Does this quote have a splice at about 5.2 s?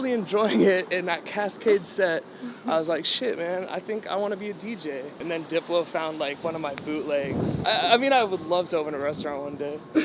yes; 2 cuts; at 5.2 s, 7.6 s

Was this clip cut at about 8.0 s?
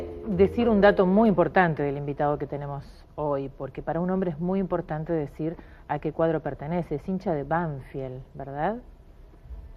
yes; 1 cut; at 8.0 s

